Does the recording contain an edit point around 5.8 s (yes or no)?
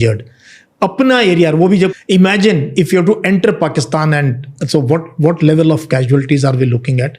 no